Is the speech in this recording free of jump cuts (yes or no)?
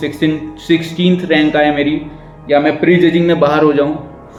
yes